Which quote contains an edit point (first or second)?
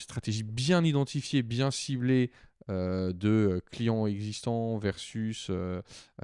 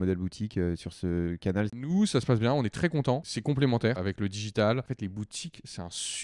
second